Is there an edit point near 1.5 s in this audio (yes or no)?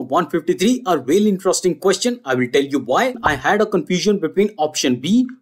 no